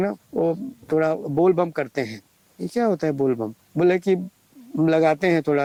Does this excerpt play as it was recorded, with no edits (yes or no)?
yes